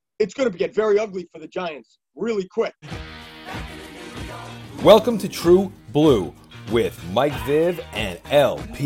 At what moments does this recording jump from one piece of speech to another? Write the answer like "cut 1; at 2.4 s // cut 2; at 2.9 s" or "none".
cut 1; at 3.0 s